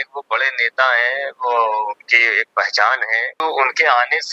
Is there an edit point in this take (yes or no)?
yes